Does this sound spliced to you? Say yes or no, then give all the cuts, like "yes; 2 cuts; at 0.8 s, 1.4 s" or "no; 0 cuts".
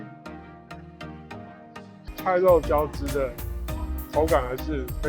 yes; 1 cut; at 2.1 s